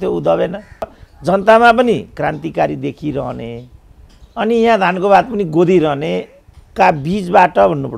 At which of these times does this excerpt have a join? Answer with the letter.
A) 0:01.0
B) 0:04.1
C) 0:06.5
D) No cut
A